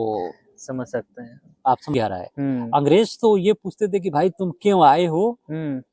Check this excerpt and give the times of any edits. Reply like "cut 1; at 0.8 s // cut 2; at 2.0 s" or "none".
cut 1; at 1.9 s